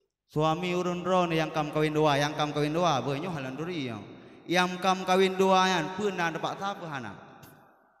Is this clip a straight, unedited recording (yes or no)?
yes